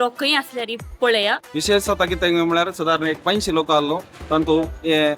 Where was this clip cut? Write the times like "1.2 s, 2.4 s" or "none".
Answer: 1.4 s